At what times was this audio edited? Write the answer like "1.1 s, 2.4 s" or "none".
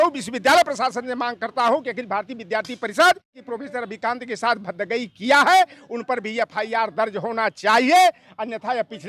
3.4 s